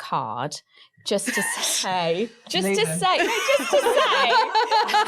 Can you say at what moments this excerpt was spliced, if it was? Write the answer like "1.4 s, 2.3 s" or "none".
none